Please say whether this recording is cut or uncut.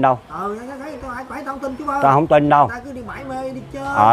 uncut